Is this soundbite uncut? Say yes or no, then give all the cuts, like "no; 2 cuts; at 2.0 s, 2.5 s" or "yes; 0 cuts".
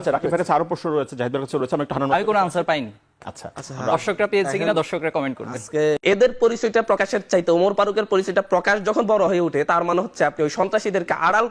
no; 1 cut; at 6.0 s